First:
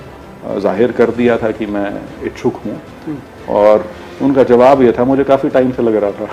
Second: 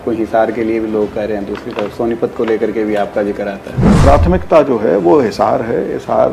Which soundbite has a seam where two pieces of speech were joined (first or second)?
second